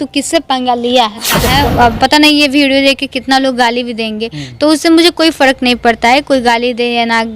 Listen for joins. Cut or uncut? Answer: cut